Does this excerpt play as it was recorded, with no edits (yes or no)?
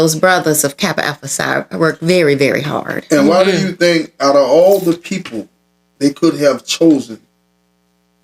yes